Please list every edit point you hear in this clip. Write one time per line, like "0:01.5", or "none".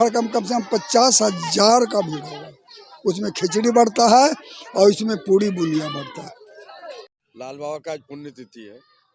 0:07.1